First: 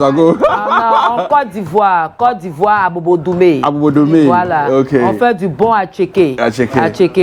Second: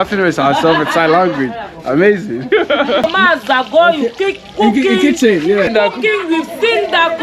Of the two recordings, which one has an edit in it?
second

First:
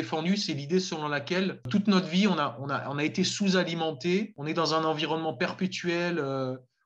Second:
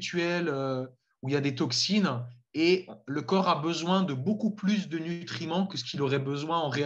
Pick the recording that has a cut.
first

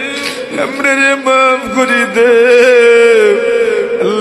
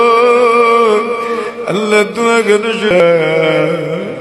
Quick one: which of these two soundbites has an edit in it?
second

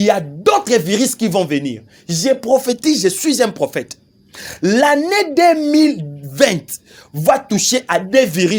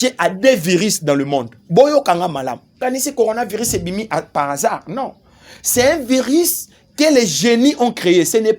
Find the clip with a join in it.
second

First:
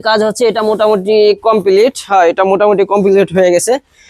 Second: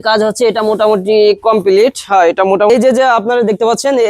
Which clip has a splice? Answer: second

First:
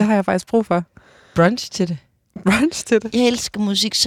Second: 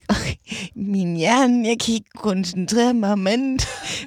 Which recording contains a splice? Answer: first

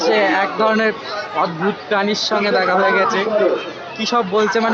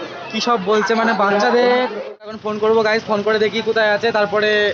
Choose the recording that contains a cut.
second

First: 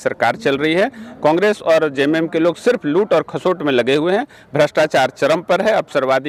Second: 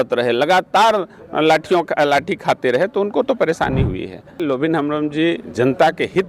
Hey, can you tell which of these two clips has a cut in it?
second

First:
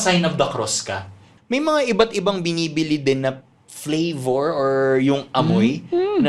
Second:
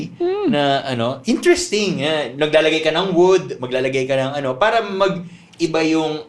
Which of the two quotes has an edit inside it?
first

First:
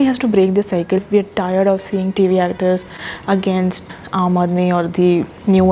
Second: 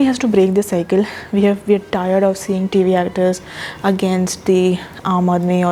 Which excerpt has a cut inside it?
first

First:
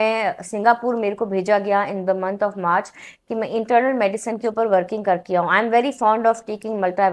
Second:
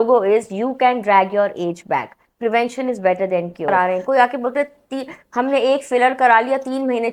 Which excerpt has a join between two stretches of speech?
second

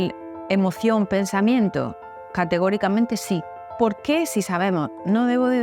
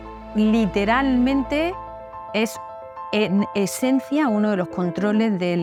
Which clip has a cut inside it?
first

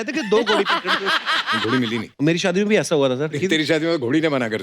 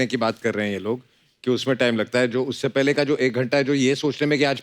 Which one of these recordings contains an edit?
first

